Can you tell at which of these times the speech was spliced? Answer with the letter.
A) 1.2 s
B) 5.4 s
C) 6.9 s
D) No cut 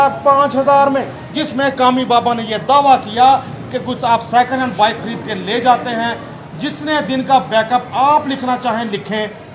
A